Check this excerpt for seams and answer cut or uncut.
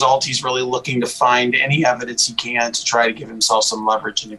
uncut